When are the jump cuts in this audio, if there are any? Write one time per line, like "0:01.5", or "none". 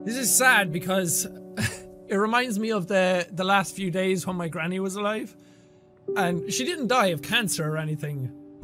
none